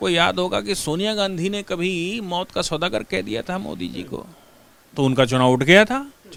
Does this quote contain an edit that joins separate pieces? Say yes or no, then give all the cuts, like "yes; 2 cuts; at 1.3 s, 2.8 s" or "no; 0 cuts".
no; 0 cuts